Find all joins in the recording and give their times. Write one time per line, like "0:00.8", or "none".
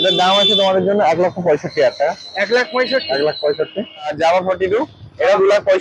0:04.1